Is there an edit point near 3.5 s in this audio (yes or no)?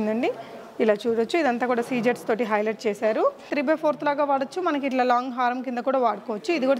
yes